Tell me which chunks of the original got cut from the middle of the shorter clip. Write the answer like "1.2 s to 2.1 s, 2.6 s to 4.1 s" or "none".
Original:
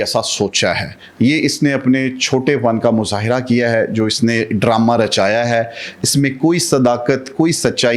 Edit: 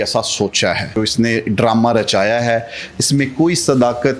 0.9 s to 4.0 s